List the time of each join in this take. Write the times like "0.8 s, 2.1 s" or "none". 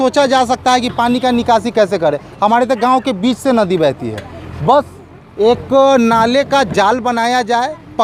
none